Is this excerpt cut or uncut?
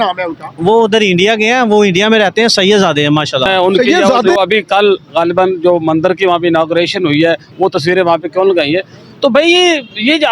cut